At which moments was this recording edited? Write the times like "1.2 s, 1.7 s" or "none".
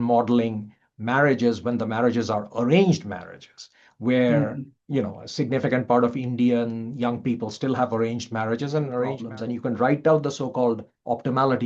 9.2 s